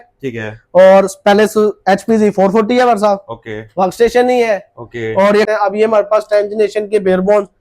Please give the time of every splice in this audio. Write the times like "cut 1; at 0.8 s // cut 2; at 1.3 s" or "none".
cut 1; at 5.5 s